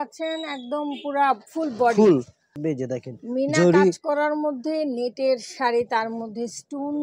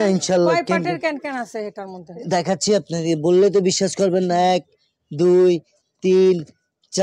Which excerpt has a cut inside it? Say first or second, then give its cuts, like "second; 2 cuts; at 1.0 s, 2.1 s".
first; 1 cut; at 2.4 s